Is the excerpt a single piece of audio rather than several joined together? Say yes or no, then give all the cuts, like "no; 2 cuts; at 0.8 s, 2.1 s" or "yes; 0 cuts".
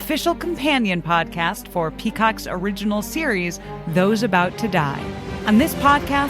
no; 1 cut; at 5.3 s